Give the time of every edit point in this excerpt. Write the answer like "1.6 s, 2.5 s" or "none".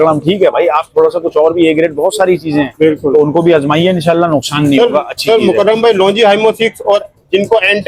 none